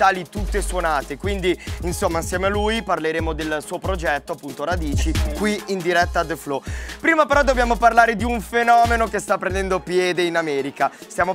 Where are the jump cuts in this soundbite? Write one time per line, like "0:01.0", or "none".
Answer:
0:01.3